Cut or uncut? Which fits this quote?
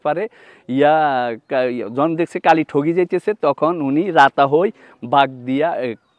uncut